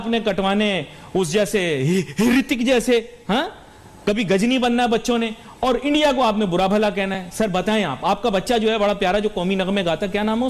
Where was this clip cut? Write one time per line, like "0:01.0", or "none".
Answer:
none